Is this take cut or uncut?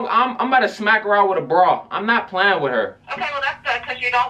uncut